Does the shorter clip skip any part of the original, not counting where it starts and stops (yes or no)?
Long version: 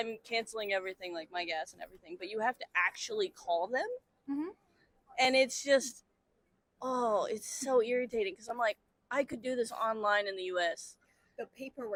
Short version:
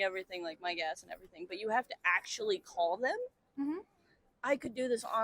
yes